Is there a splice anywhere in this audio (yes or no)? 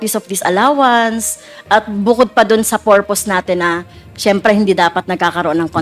no